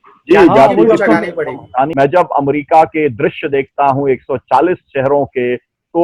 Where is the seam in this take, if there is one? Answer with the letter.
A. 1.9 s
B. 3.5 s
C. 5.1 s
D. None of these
A